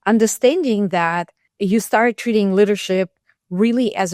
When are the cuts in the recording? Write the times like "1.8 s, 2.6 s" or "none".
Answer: 1.4 s